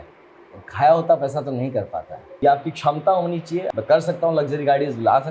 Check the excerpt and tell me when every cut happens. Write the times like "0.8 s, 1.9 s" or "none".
2.4 s, 3.7 s